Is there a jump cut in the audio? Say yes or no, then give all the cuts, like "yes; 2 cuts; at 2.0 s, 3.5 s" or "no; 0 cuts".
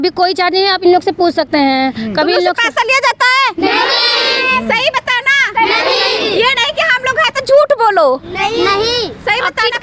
no; 0 cuts